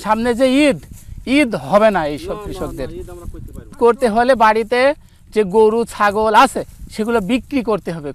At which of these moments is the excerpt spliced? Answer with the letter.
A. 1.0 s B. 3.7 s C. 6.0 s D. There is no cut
B